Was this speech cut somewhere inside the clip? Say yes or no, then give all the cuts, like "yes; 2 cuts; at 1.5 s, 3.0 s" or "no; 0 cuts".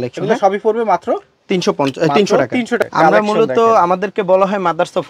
yes; 1 cut; at 2.8 s